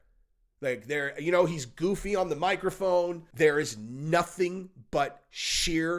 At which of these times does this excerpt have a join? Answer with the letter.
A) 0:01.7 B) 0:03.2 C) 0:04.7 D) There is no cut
B